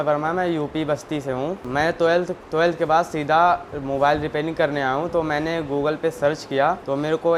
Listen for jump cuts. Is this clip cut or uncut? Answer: uncut